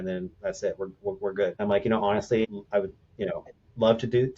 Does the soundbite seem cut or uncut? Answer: cut